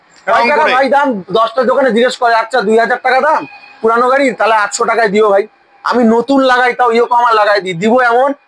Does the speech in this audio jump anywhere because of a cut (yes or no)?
no